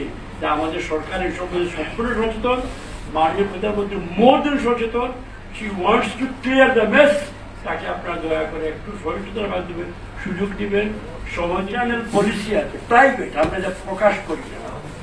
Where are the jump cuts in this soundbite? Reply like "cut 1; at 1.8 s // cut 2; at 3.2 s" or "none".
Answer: cut 1; at 11.9 s